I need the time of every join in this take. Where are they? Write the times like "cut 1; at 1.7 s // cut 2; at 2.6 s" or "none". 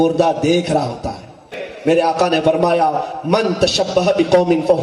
cut 1; at 1.5 s

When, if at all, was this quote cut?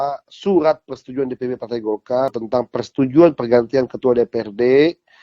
cut 1; at 2.4 s

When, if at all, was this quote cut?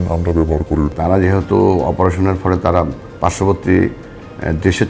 cut 1; at 0.9 s

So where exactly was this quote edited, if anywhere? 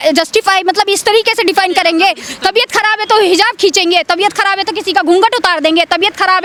none

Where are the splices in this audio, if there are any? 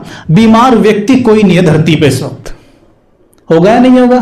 none

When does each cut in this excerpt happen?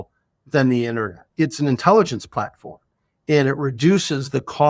cut 1; at 1.2 s

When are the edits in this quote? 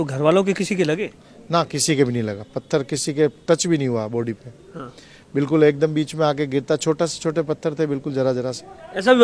none

